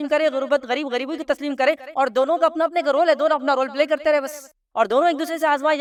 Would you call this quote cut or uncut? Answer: uncut